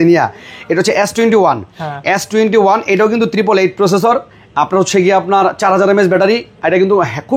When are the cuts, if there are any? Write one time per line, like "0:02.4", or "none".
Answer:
none